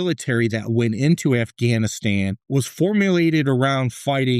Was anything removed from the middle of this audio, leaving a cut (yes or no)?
yes